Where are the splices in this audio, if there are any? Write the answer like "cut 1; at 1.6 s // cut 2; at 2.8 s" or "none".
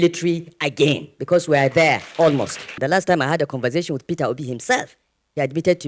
cut 1; at 2.7 s